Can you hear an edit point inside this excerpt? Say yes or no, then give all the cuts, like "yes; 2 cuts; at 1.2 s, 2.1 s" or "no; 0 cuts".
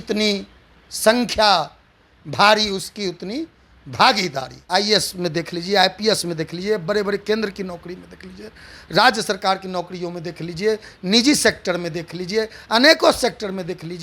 yes; 1 cut; at 4.5 s